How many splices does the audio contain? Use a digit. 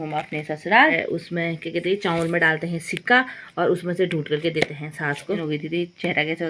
2